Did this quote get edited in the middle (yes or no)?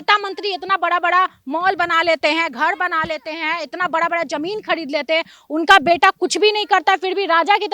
no